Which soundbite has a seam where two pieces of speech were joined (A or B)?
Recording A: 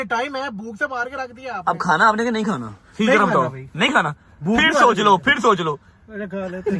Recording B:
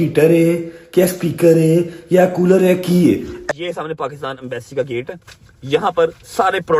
B